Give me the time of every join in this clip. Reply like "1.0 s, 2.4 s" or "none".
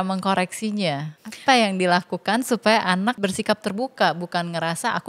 1.1 s, 3.2 s